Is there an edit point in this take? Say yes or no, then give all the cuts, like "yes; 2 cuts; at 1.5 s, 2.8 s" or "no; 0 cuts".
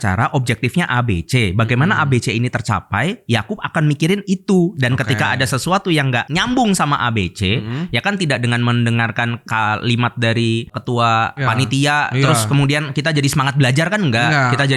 no; 0 cuts